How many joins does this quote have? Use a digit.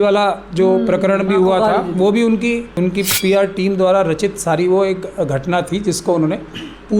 1